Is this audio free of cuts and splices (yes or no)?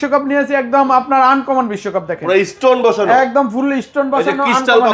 yes